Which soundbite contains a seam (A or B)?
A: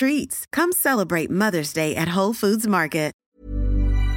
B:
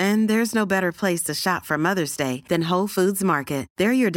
A